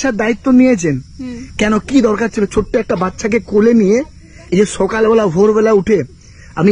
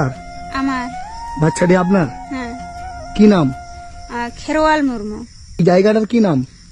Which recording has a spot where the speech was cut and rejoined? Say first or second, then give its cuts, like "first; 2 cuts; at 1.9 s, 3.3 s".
second; 1 cut; at 5.6 s